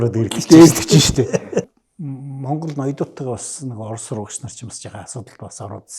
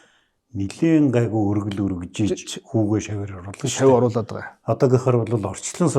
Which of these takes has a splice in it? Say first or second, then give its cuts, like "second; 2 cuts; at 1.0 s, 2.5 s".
first; 1 cut; at 1.8 s